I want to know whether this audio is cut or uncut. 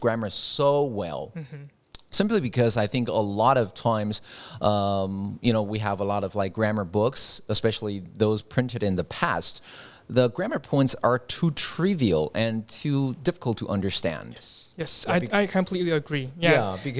uncut